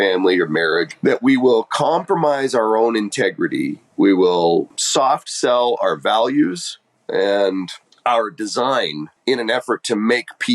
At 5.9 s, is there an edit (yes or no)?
no